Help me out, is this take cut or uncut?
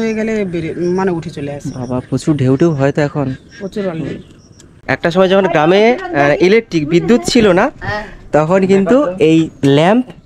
cut